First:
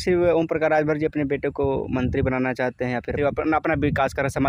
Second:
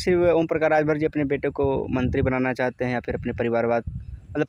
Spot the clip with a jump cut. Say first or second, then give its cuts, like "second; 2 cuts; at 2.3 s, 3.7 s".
first; 1 cut; at 3.1 s